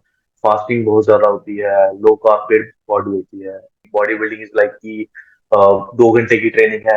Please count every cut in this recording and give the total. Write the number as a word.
one